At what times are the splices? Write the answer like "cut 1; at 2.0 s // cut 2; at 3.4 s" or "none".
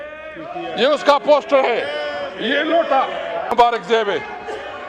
cut 1; at 3.5 s